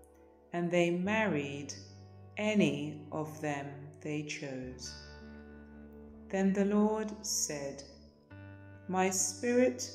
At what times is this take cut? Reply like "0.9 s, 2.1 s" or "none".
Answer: 4.7 s, 6.3 s

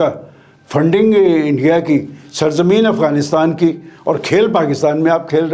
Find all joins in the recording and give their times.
none

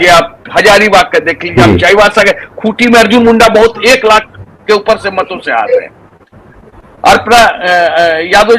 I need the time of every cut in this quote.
none

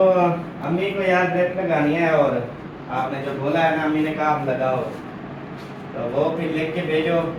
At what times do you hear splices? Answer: none

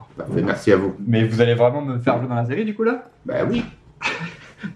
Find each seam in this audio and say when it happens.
1.0 s

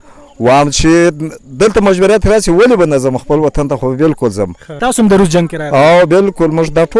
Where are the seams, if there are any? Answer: 4.7 s

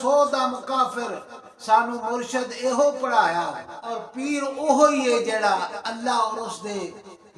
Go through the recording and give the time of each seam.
4.1 s

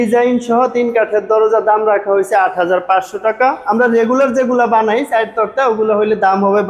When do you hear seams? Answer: 3.6 s

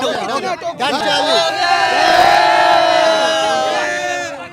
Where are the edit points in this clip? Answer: 1.0 s

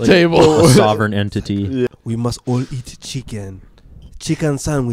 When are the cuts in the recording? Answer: 1.9 s

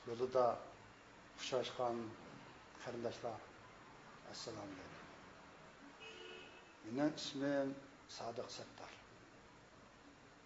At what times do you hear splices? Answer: 7.4 s

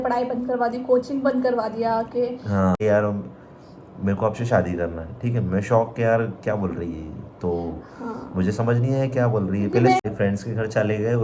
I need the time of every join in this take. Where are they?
2.8 s, 10.0 s

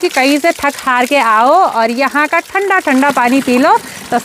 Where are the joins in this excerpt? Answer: none

